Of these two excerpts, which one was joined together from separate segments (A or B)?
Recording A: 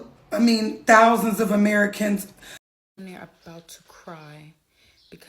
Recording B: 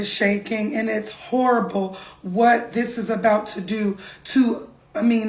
A